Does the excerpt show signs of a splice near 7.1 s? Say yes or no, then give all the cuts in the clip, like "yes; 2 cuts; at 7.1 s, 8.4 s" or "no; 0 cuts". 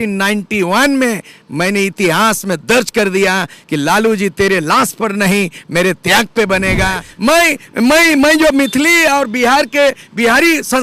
yes; 1 cut; at 7.1 s